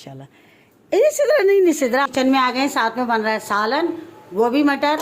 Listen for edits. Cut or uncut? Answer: cut